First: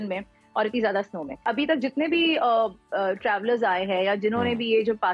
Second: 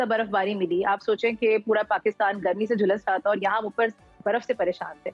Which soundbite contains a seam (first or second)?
first